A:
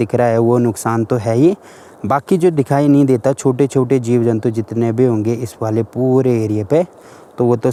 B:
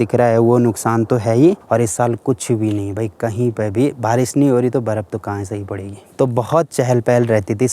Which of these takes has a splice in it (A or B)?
B